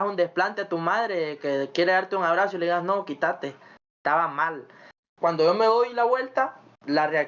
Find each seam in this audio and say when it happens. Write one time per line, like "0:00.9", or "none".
0:05.1